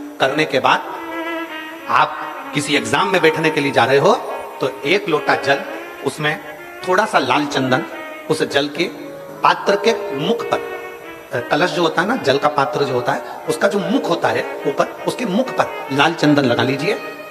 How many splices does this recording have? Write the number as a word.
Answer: zero